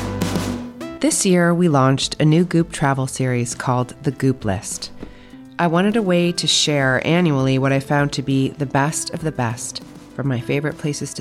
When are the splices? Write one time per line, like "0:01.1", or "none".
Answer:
0:00.9